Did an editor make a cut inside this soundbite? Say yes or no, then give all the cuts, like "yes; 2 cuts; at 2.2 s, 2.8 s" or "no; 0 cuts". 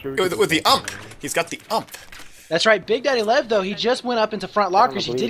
no; 0 cuts